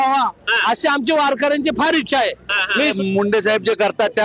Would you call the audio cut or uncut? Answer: cut